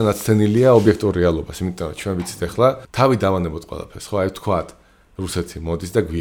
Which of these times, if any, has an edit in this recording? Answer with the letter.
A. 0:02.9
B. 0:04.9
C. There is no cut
A